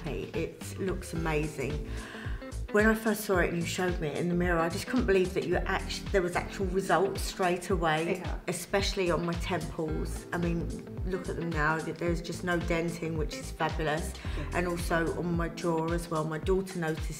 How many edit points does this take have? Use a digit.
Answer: 0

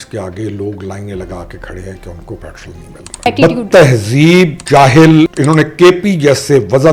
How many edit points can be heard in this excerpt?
3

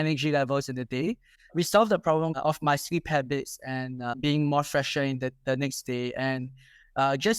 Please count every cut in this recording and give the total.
2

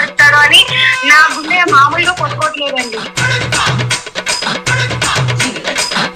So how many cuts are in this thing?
1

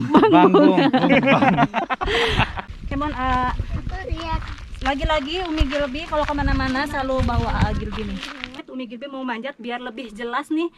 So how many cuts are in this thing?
2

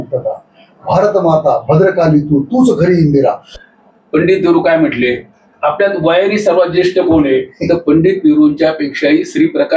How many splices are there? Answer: 1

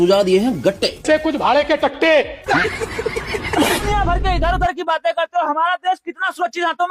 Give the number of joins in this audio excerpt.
1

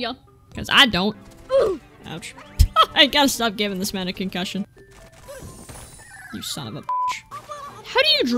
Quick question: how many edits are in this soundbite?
3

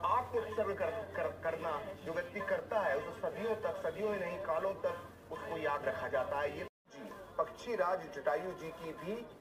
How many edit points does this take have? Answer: 1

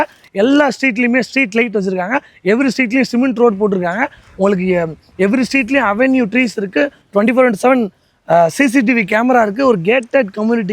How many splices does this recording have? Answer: 0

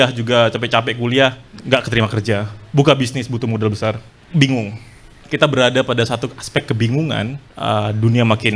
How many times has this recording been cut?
3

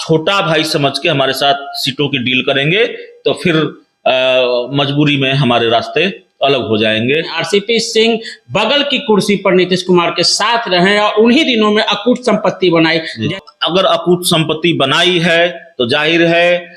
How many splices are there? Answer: 2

